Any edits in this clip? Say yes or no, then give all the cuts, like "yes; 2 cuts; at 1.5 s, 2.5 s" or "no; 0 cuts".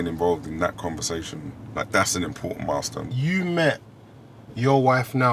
yes; 2 cuts; at 1.6 s, 3.0 s